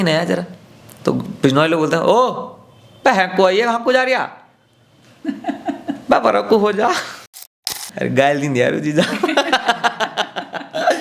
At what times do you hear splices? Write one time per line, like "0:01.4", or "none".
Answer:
0:07.8